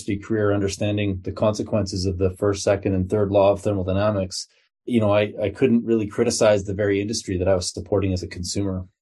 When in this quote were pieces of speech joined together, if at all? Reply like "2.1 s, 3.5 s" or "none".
none